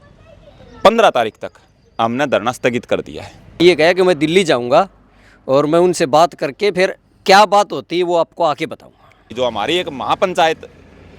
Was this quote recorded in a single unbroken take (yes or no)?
no